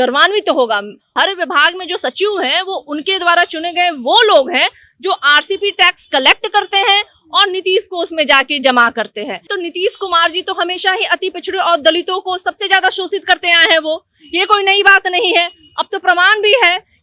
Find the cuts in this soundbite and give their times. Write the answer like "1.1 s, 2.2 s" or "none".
1.1 s, 9.5 s